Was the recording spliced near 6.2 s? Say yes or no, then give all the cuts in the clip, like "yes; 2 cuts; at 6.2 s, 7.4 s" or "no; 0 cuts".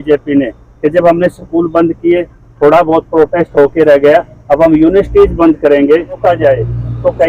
yes; 1 cut; at 6.2 s